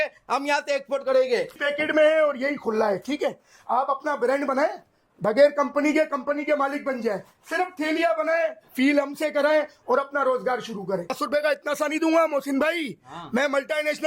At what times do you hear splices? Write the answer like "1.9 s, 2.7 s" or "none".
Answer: 1.6 s, 11.2 s